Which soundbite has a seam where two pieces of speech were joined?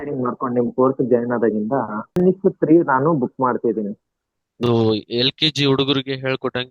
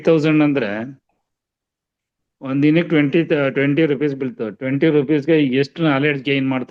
first; 2 cuts; at 2.1 s, 4.5 s

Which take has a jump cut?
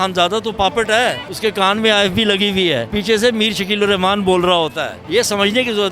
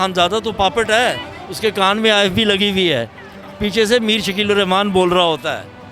first; 3 cuts; at 1.3 s, 2.9 s, 4.9 s

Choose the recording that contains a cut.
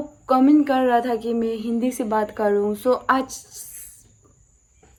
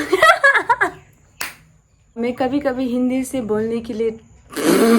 second; 1 cut; at 2.1 s

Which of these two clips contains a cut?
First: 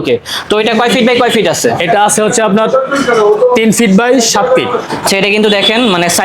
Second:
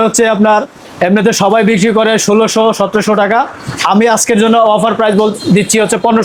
first; 1 cut; at 5.1 s

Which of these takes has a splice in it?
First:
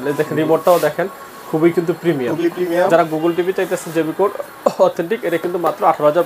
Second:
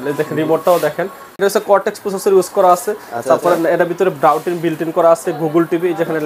second; 1 cut; at 1.4 s

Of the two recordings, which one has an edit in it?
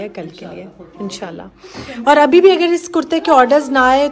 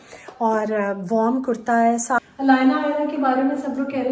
second; 1 cut; at 2.2 s

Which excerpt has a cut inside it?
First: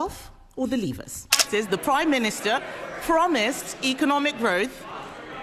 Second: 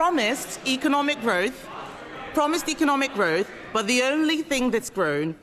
first; 1 cut; at 1.4 s

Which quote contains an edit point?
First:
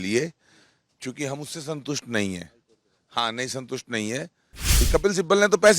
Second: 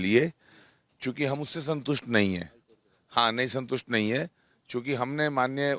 first; 1 cut; at 4.8 s

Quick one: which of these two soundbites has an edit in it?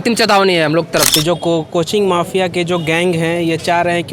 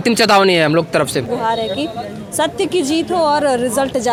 first; 1 cut; at 1.1 s

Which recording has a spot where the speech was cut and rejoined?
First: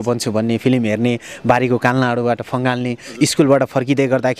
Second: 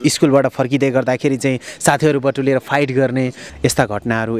second; 1 cut; at 3.4 s

